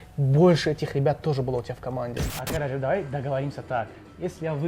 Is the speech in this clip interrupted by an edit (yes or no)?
yes